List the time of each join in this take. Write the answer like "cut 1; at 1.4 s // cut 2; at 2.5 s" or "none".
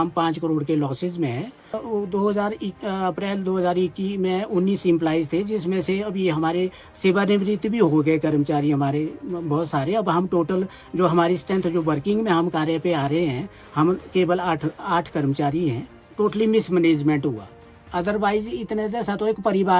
cut 1; at 1.8 s // cut 2; at 16.0 s